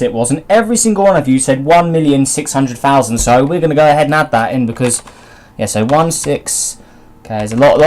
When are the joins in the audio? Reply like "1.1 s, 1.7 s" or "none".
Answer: 3.1 s